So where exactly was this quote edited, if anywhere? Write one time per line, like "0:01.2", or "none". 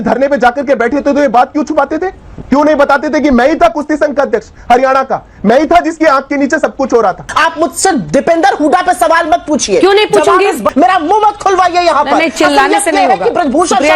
0:07.3
0:10.6